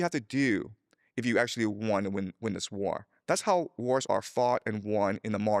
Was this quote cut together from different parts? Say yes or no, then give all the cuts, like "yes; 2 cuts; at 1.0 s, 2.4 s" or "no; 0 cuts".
no; 0 cuts